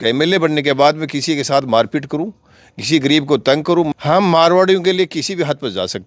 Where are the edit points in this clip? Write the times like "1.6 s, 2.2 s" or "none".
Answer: 3.9 s